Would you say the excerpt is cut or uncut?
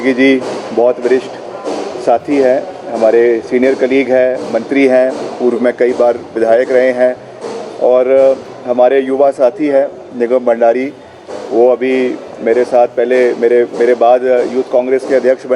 uncut